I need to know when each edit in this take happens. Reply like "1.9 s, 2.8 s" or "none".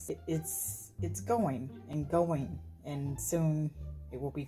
none